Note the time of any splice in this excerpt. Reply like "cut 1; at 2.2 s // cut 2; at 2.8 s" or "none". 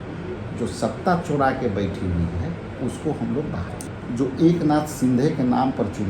cut 1; at 3.8 s